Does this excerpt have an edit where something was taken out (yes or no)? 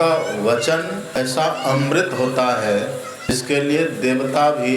yes